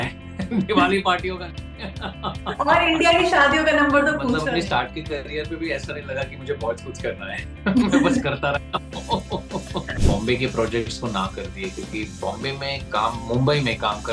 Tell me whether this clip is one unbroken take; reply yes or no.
no